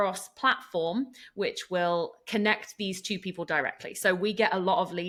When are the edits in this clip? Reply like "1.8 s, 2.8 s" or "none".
none